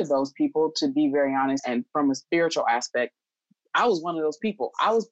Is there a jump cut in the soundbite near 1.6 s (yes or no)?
yes